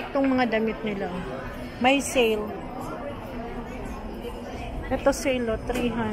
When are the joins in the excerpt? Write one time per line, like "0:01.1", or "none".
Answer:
none